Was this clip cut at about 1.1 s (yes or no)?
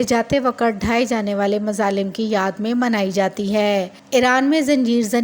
no